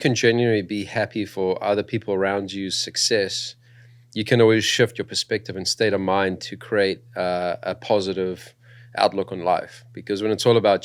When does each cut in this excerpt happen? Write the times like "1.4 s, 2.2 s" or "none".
none